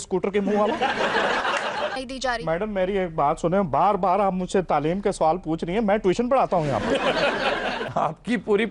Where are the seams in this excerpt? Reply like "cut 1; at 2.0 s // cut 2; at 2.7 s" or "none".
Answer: cut 1; at 2.0 s // cut 2; at 7.8 s